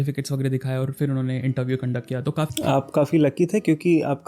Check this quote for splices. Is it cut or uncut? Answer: cut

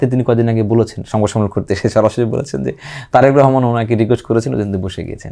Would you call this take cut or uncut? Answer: uncut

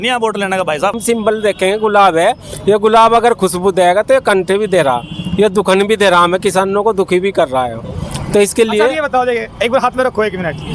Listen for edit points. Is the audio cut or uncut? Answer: cut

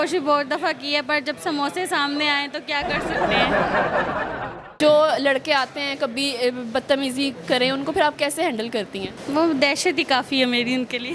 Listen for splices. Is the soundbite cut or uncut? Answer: cut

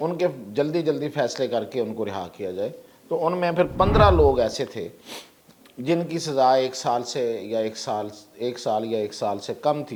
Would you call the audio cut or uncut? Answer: uncut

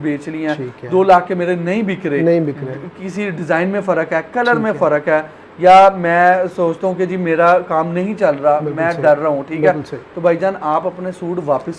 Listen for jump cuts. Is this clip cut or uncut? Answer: uncut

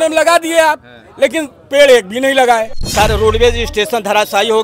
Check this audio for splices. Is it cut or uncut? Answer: cut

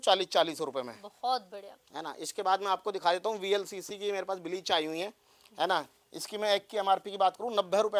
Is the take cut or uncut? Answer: uncut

